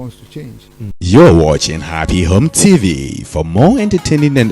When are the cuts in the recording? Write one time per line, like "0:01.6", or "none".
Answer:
0:01.0